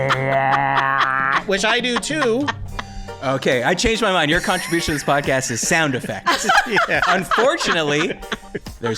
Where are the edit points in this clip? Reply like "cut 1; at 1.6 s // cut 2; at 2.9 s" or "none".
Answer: cut 1; at 3.2 s